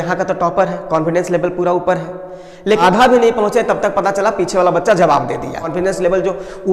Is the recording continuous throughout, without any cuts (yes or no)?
no